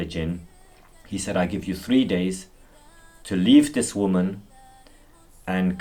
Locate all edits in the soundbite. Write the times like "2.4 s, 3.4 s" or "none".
none